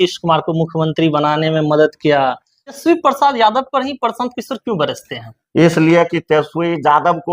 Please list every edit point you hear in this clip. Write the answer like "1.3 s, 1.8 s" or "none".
2.8 s